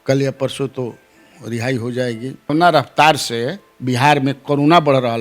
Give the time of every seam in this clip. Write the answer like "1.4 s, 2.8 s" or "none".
2.5 s